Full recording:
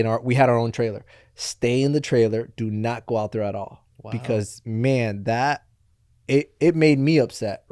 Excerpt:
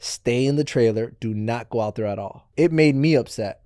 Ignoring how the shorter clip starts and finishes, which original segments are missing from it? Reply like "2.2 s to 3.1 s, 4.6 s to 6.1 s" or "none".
3.8 s to 6.5 s

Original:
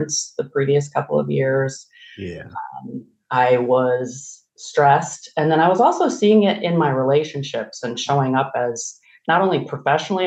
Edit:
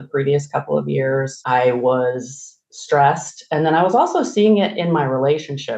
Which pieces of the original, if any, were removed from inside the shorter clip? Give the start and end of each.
1.8 s to 3.2 s

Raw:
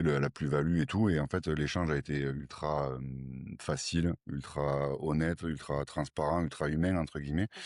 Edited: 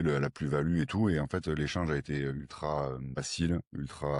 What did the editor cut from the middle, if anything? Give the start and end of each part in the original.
3.2 s to 3.7 s

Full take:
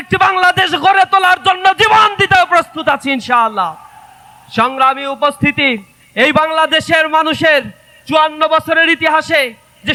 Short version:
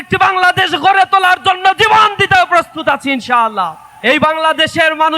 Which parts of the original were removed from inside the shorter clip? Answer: 3.9 s to 6.0 s

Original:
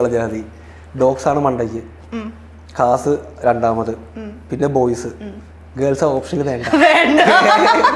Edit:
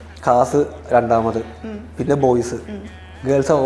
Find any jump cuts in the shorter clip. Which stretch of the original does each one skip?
none

